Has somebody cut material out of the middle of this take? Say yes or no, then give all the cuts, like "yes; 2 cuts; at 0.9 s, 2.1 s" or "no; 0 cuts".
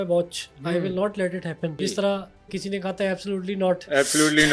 yes; 1 cut; at 1.8 s